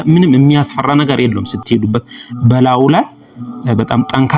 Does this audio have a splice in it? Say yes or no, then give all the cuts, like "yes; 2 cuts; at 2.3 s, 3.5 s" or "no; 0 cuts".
no; 0 cuts